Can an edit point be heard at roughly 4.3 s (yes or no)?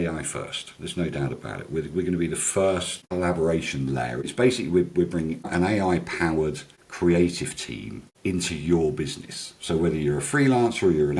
yes